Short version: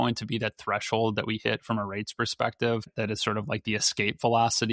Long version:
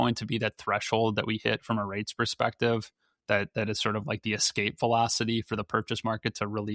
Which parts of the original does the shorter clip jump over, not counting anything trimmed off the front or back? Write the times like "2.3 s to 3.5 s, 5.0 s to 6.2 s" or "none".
2.9 s to 3.5 s